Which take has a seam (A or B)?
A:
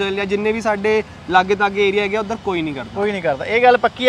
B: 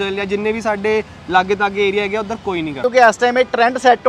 B